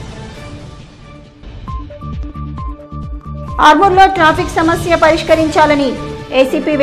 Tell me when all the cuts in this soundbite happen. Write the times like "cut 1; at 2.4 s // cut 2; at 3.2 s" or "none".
cut 1; at 1.3 s